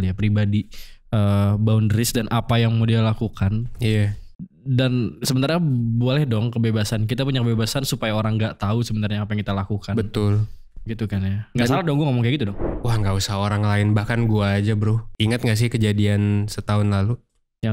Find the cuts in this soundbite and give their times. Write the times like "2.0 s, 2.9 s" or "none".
12.6 s